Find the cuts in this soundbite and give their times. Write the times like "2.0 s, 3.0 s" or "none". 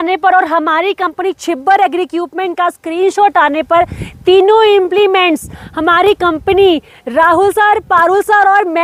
none